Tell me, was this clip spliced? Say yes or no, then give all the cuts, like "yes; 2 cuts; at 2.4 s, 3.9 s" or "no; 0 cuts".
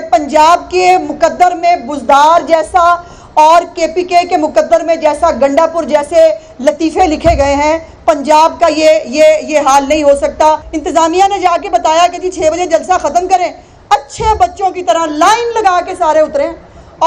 yes; 1 cut; at 10.7 s